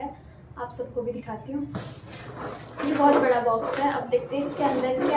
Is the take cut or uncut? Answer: uncut